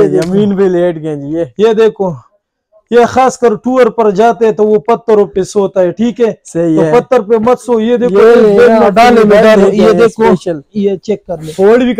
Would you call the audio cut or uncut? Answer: uncut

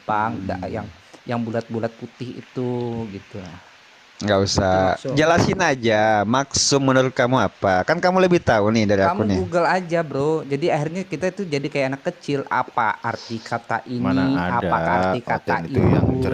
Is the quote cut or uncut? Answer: uncut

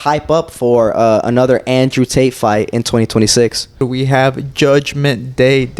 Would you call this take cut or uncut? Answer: cut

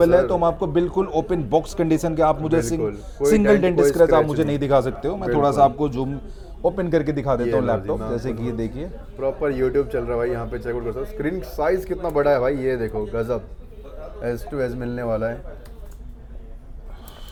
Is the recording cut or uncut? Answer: uncut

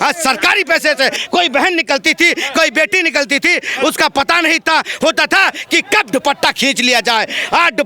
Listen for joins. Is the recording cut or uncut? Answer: cut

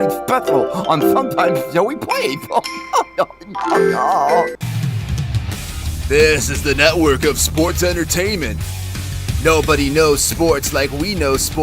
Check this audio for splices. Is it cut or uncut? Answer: cut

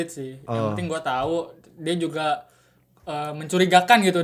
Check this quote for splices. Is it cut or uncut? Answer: uncut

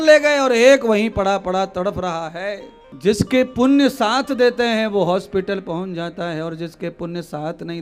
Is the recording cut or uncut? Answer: uncut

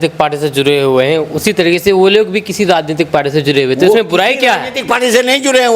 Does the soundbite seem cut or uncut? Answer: uncut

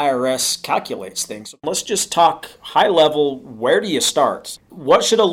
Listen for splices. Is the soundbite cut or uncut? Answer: cut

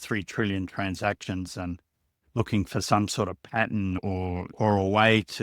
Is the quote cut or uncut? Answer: cut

